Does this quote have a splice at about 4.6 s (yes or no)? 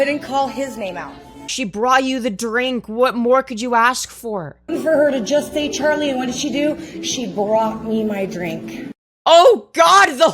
yes